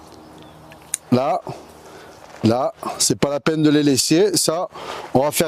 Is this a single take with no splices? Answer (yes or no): yes